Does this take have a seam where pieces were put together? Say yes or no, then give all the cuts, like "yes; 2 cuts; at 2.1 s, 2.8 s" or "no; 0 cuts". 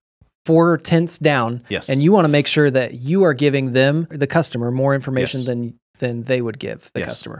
yes; 1 cut; at 4.2 s